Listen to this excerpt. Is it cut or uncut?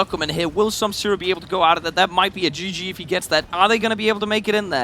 cut